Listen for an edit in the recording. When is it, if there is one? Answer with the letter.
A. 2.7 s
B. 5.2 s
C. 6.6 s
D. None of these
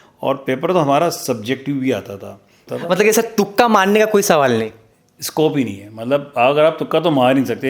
A